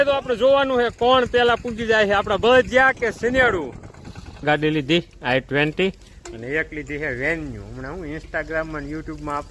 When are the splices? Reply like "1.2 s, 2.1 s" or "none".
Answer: 4.4 s